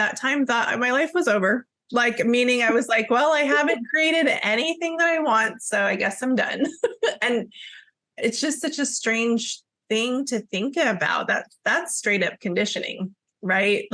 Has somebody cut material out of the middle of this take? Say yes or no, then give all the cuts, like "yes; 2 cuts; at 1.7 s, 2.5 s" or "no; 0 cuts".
no; 0 cuts